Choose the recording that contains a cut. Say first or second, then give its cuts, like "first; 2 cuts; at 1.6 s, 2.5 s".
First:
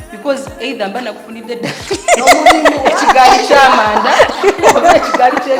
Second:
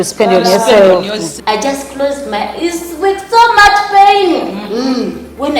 second; 1 cut; at 1.3 s